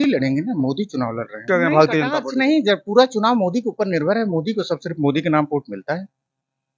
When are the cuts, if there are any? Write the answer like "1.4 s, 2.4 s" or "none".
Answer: 1.4 s